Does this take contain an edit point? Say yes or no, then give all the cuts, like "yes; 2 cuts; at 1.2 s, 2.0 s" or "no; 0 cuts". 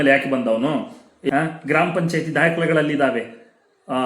yes; 1 cut; at 1.2 s